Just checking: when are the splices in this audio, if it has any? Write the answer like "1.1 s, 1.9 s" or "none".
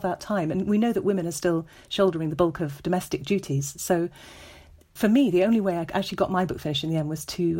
4.9 s